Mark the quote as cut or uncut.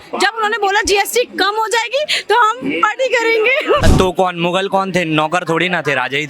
cut